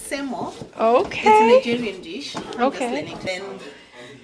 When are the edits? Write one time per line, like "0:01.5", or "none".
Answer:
0:03.3